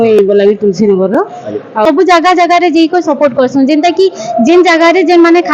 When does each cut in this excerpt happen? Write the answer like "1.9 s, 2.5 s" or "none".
1.8 s